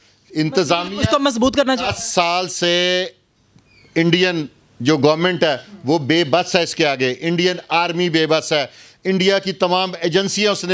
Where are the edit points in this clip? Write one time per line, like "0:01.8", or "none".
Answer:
none